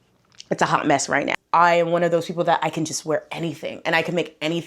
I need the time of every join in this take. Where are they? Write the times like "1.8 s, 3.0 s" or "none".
1.4 s